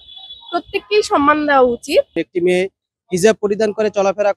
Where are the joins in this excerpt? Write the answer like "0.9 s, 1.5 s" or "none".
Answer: 2.2 s